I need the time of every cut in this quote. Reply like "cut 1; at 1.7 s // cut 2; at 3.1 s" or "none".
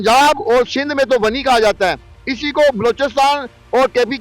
none